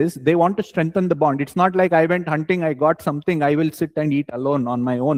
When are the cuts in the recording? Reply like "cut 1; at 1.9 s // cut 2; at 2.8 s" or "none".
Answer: none